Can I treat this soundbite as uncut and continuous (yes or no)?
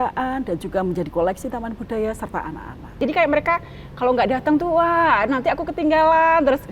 no